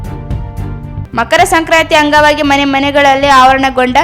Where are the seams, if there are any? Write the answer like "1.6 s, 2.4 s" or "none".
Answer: 1.1 s